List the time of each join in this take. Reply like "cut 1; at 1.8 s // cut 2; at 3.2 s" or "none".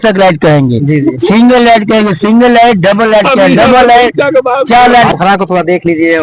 cut 1; at 5.1 s